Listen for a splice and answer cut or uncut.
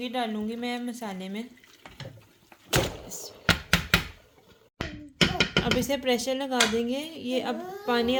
uncut